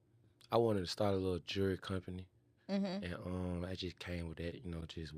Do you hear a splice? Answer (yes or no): no